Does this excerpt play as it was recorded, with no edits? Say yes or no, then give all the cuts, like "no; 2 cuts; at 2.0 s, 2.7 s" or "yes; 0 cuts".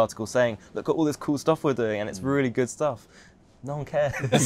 yes; 0 cuts